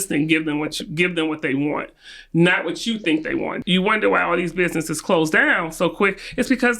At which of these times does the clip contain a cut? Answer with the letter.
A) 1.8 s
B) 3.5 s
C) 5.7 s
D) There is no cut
B